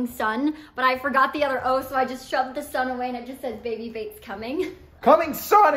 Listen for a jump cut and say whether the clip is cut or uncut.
cut